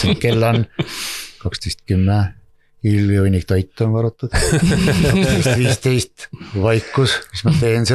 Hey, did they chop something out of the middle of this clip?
no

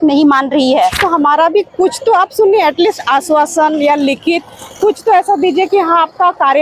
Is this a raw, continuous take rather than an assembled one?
no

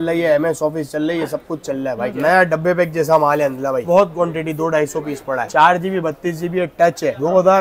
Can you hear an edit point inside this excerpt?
yes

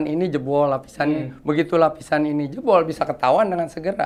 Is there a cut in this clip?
no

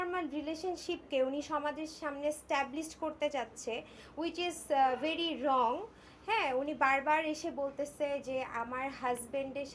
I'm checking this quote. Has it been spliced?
no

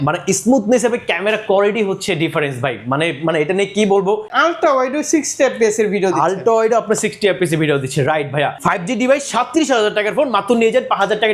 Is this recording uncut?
no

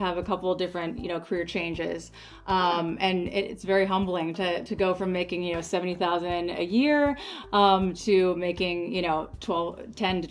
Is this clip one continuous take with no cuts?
yes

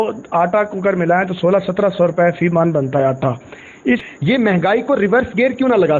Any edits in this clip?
yes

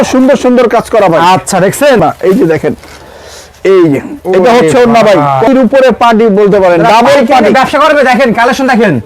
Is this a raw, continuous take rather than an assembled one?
no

